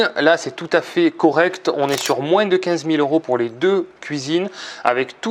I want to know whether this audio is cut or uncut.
uncut